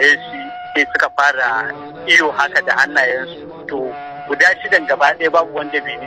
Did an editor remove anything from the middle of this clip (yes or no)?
no